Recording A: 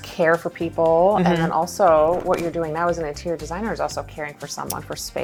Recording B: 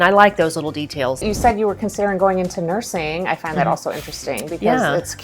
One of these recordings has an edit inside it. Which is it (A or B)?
B